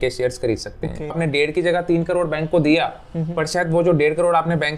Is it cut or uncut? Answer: cut